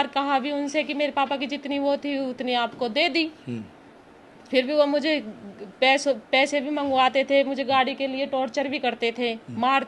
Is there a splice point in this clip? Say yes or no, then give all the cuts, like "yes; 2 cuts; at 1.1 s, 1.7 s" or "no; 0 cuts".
no; 0 cuts